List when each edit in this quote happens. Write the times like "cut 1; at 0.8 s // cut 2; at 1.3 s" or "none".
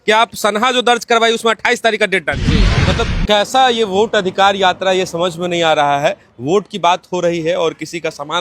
cut 1; at 2.7 s